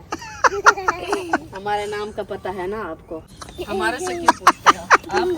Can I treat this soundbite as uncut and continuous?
no; 1 cut; at 3.2 s

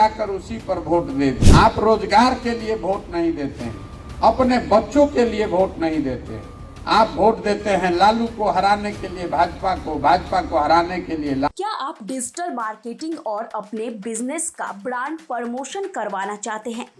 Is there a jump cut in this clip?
yes; 2 cuts; at 1.4 s, 11.5 s

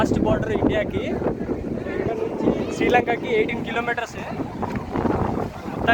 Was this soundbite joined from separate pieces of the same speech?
no; 0 cuts

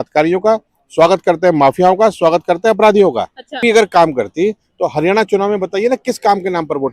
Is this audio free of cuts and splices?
no; 1 cut; at 3.6 s

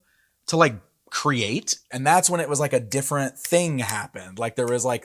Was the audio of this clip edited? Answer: yes; 1 cut; at 1.9 s

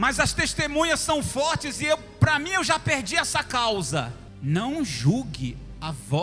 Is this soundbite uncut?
no; 1 cut; at 4.2 s

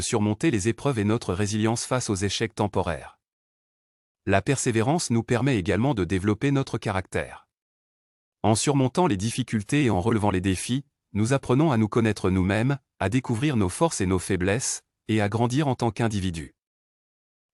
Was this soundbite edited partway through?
no; 0 cuts

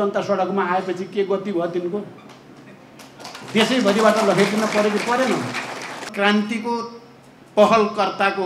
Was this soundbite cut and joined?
yes; 1 cut; at 6.1 s

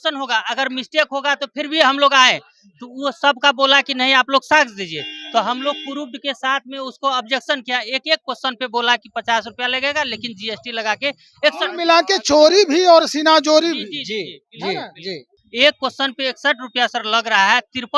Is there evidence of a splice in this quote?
yes; 1 cut; at 15.2 s

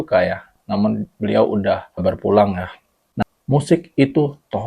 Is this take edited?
yes; 1 cut; at 3.2 s

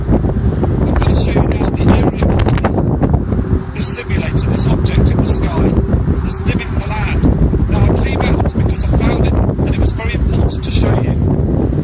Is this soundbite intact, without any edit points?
no; 1 cut; at 6.7 s

